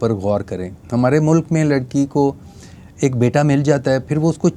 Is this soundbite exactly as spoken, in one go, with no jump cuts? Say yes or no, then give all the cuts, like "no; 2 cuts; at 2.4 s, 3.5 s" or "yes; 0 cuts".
yes; 0 cuts